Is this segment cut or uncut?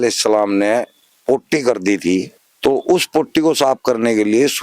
cut